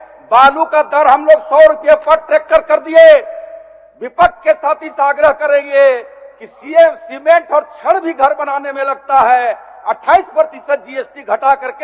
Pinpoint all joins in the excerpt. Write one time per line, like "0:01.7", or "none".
none